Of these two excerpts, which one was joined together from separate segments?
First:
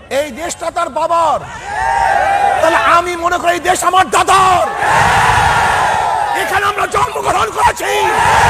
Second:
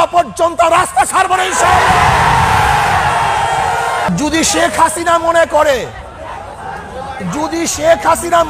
second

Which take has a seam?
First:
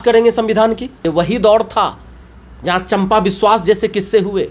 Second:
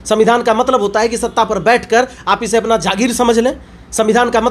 first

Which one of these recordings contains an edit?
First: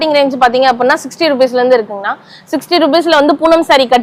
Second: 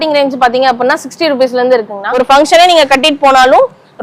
second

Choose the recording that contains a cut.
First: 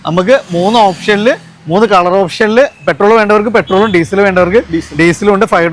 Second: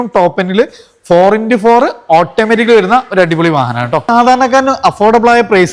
second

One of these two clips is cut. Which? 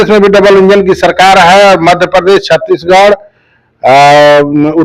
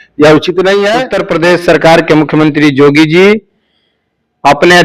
second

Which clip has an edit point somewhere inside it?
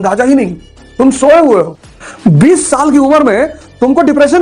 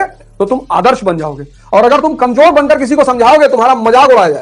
first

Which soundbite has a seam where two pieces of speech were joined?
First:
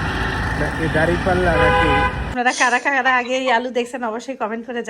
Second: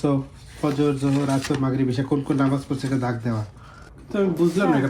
first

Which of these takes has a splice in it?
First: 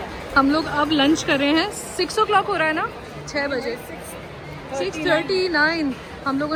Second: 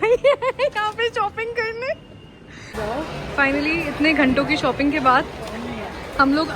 second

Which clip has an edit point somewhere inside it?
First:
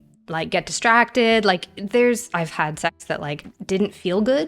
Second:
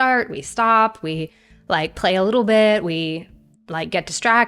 first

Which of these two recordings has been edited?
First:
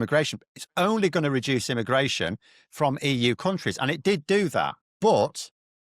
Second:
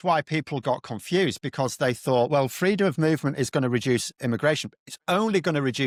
first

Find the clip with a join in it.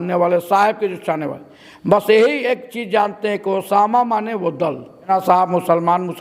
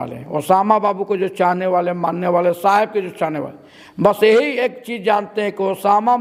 first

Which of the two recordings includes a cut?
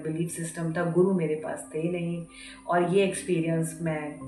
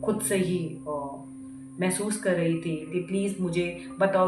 second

